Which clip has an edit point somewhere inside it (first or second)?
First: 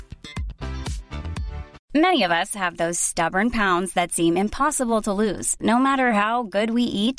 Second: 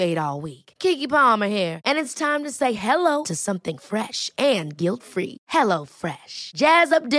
first